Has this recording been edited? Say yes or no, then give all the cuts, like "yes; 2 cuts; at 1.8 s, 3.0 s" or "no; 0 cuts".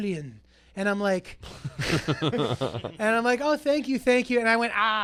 no; 0 cuts